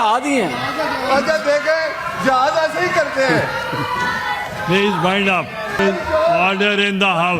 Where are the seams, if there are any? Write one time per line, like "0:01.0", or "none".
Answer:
0:05.8